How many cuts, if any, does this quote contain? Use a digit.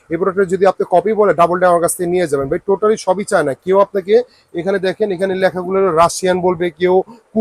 0